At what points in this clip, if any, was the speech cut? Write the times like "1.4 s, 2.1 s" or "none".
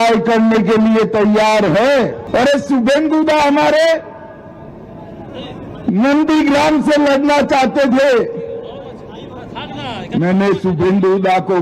2.2 s